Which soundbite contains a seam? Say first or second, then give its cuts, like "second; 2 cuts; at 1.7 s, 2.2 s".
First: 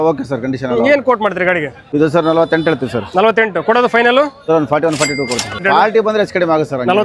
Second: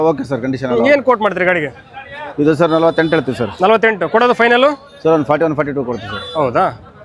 first; 3 cuts; at 1.8 s, 4.4 s, 5.6 s